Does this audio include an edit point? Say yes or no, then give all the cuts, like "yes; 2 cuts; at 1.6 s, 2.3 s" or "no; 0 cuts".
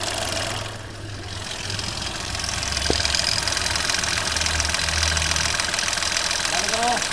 no; 0 cuts